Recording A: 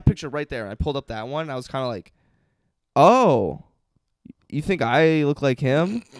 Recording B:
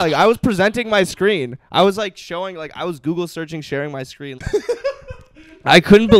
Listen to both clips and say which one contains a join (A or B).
B